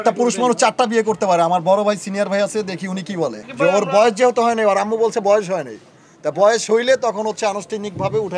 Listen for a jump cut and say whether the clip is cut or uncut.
cut